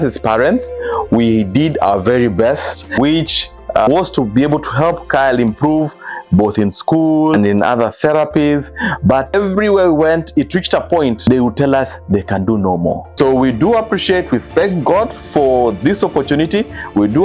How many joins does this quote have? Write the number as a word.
two